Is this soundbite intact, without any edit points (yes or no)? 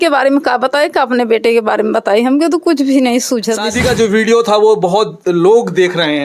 no